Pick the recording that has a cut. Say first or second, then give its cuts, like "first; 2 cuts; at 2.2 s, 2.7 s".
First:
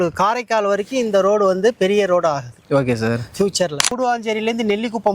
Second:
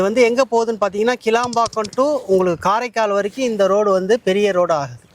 first; 1 cut; at 3.9 s